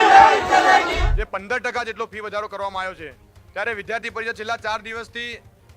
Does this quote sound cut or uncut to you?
cut